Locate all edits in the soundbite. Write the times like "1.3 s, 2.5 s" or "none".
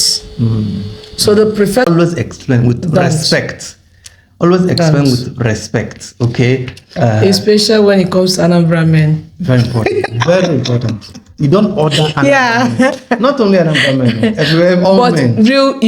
1.8 s